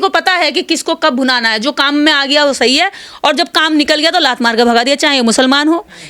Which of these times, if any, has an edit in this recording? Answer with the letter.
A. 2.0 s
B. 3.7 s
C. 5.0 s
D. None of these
D